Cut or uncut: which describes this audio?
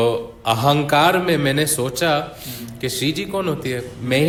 uncut